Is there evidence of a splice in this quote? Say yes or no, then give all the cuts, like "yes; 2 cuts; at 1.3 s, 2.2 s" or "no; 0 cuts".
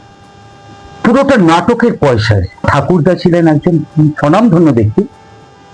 yes; 1 cut; at 2.7 s